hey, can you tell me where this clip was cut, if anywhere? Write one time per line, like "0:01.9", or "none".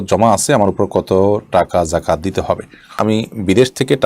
0:03.0